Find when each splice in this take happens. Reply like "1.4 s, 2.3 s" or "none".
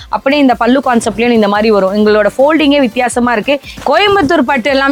3.7 s